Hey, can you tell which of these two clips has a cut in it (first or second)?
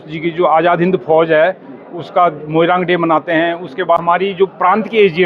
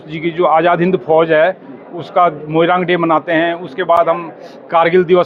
first